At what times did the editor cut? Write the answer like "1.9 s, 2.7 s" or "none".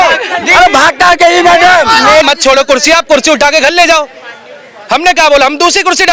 2.3 s